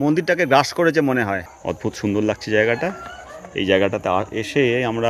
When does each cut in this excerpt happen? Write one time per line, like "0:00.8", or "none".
0:01.4